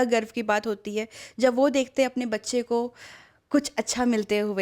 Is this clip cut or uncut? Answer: uncut